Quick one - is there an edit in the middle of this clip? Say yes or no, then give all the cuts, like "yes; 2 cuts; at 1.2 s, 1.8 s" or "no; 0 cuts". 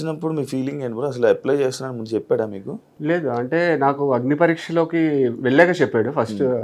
no; 0 cuts